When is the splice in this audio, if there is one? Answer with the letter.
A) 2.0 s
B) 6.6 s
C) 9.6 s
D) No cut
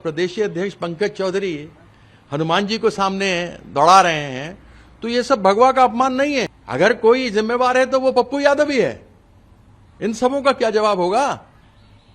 B